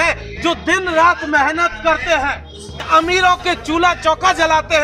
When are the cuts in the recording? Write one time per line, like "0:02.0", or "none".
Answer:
0:02.8